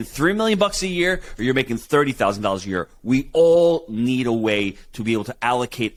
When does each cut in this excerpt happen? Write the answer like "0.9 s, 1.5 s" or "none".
none